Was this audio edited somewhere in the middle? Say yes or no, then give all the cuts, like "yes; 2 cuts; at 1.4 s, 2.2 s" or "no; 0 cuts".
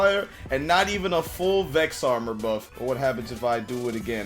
yes; 1 cut; at 2.7 s